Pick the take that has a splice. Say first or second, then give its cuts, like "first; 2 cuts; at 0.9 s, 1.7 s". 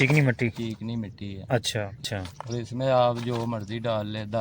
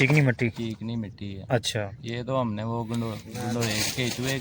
first; 1 cut; at 2.0 s